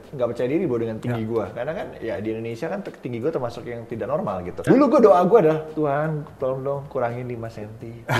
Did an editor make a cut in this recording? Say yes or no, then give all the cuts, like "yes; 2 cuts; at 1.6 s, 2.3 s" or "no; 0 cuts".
yes; 1 cut; at 4.6 s